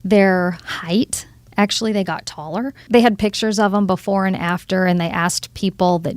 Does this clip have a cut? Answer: yes; 1 cut; at 2.8 s

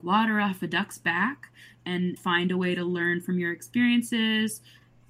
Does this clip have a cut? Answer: yes; 1 cut; at 2.2 s

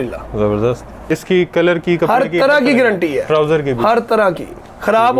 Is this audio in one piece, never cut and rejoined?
no; 1 cut; at 1.1 s

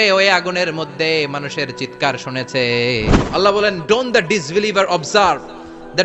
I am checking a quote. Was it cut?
yes; 1 cut; at 3.2 s

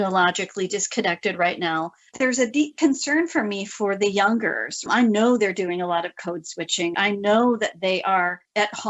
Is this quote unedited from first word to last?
no; 2 cuts; at 2.1 s, 6.9 s

